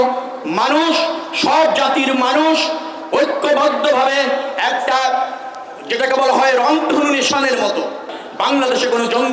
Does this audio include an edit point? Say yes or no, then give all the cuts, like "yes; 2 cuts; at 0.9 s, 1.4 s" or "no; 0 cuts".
yes; 1 cut; at 8.2 s